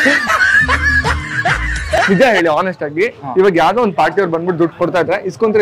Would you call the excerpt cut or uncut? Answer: cut